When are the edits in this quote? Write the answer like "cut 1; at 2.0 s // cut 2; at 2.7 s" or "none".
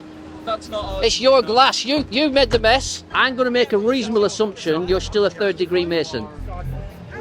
cut 1; at 3.1 s

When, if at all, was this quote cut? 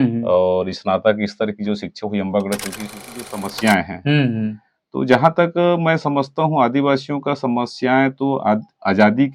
cut 1; at 2.9 s

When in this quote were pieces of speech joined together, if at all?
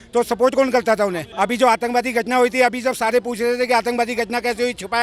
cut 1; at 1.2 s

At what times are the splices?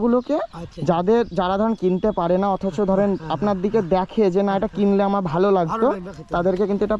none

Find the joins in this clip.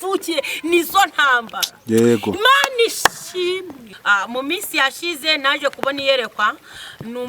cut 1; at 3.9 s

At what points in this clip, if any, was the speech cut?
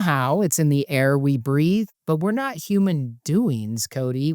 cut 1; at 2.0 s

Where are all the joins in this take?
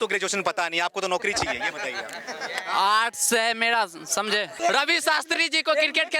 cut 1; at 4.5 s

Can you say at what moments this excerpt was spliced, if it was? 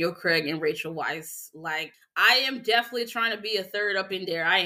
cut 1; at 2.0 s

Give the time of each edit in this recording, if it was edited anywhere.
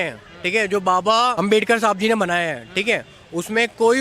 cut 1; at 1.3 s

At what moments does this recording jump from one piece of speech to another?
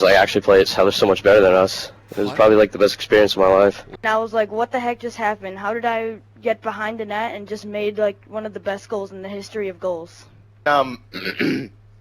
cut 1; at 3.9 s // cut 2; at 10.6 s

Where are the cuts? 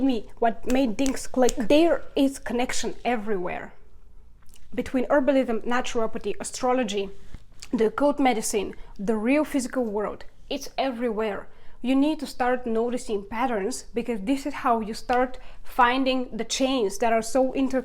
cut 1; at 1.6 s

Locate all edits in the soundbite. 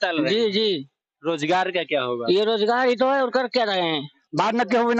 cut 1; at 4.1 s

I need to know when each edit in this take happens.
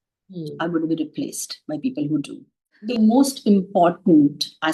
cut 1; at 2.9 s

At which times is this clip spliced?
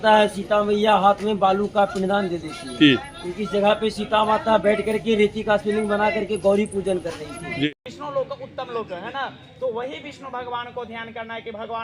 cut 1; at 7.7 s

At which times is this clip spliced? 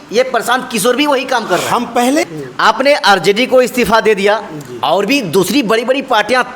cut 1; at 2.2 s

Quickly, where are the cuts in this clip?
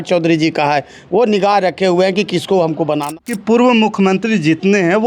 cut 1; at 3.0 s

